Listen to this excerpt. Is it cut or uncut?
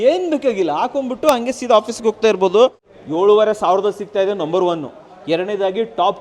cut